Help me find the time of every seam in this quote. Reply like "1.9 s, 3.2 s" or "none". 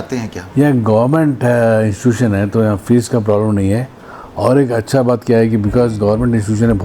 none